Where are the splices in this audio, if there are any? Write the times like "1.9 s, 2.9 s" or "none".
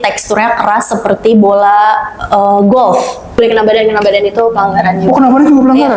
3.4 s